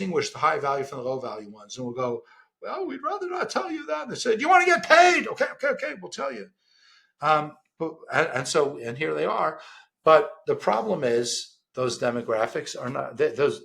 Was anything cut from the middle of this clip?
no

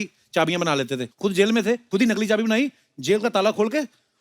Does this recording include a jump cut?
yes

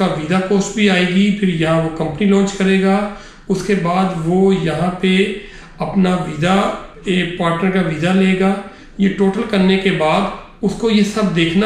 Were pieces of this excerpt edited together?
no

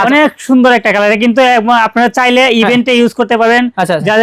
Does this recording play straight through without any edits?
yes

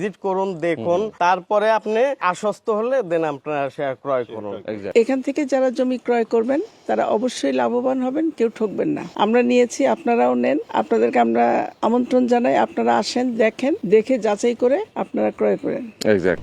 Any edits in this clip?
yes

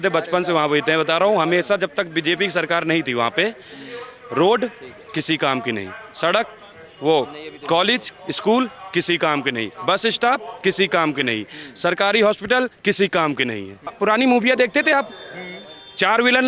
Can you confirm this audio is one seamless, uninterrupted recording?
no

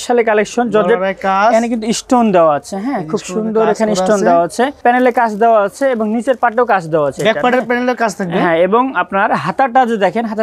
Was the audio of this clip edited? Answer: yes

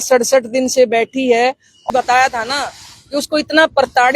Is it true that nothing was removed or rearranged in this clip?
no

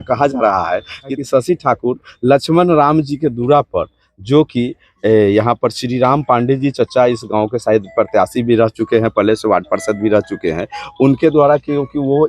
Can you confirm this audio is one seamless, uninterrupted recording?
no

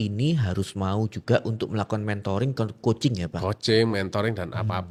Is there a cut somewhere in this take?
no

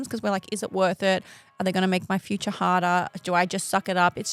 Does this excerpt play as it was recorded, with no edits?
yes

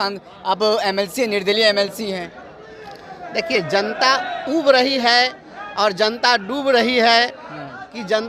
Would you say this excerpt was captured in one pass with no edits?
yes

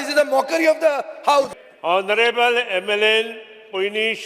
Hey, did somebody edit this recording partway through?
yes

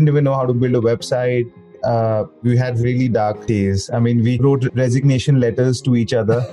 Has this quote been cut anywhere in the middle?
yes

